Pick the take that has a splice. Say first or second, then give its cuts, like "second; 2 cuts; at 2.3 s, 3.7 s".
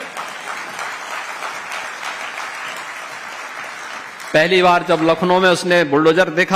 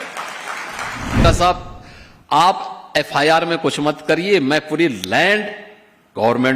second; 1 cut; at 1.2 s